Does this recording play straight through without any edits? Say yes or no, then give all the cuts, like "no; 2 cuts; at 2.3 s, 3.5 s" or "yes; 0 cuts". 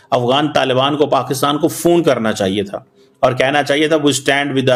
yes; 0 cuts